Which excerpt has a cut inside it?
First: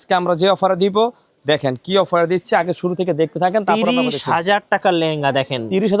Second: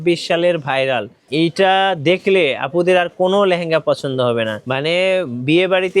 second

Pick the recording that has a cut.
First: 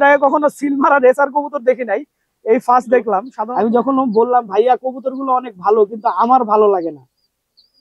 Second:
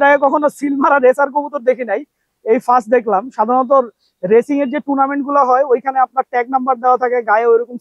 first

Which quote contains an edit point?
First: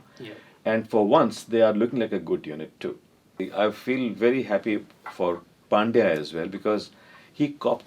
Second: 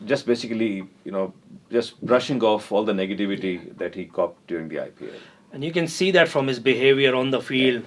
first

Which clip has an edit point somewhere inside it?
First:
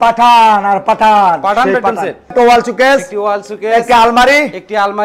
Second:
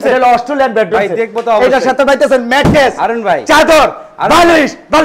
first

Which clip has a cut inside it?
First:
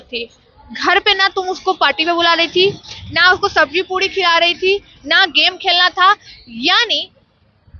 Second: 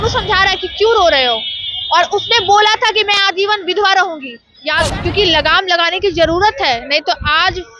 second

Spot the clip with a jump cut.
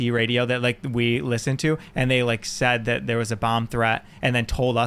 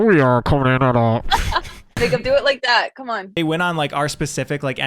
second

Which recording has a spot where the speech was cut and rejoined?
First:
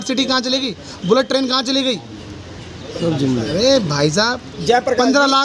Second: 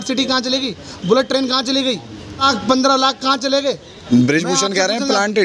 second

